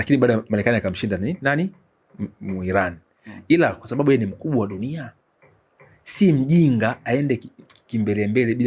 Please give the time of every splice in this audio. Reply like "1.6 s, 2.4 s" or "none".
none